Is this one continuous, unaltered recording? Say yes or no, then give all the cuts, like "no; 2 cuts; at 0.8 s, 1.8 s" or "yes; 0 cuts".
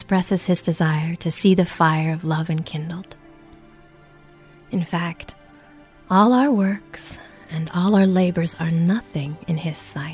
yes; 0 cuts